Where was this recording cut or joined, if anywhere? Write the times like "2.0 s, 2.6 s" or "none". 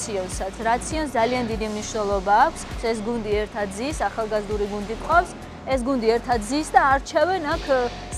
2.8 s

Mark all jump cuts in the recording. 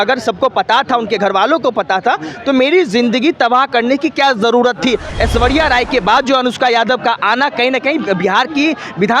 5.1 s

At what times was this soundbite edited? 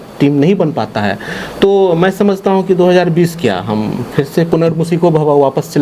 none

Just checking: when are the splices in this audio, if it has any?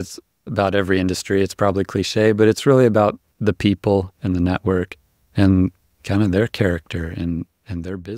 none

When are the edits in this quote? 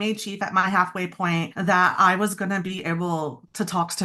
1.5 s

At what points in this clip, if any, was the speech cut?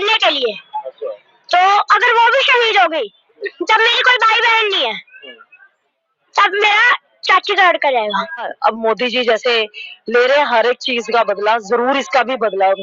3.4 s, 8.5 s

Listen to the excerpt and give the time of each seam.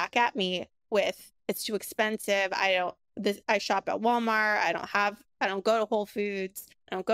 none

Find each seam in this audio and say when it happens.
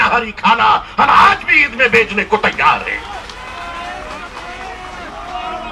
none

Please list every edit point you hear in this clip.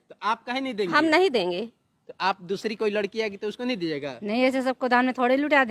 none

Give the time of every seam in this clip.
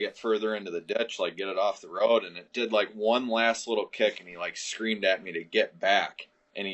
none

